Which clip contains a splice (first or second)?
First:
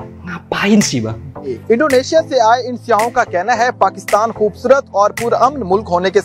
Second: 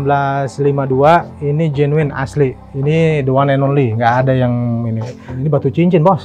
first